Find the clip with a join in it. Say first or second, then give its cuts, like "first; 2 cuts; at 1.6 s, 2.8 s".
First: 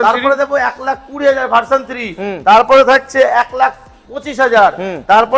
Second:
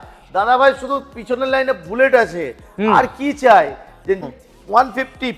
second; 1 cut; at 4.3 s